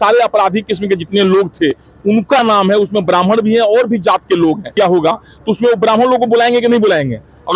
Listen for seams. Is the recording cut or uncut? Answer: cut